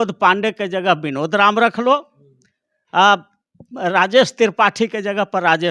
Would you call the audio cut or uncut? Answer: uncut